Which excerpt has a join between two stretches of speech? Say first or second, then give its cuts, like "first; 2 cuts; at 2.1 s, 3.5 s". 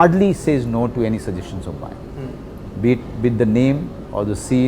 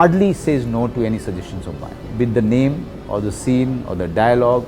second; 1 cut; at 2.0 s